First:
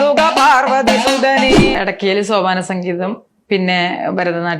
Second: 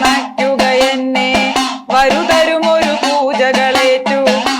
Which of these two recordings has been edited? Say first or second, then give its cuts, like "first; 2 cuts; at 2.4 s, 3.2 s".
first; 1 cut; at 1.7 s